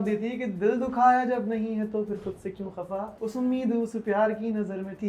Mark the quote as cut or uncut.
cut